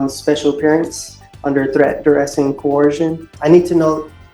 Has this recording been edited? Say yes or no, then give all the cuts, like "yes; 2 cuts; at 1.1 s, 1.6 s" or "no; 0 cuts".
yes; 1 cut; at 3.3 s